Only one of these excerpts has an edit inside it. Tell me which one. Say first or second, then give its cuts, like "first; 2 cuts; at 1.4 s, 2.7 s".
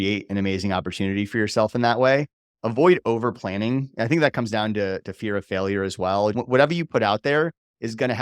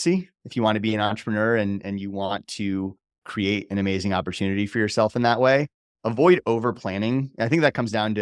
first; 1 cut; at 6.4 s